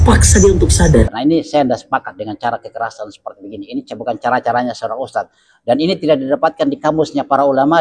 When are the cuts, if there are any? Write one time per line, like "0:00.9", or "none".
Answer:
0:01.1